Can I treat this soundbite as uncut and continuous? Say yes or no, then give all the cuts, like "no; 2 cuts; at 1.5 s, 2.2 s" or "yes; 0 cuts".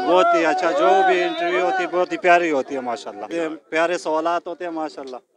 no; 1 cut; at 3.2 s